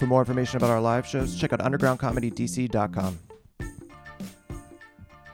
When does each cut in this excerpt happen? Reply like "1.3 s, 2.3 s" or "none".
3.2 s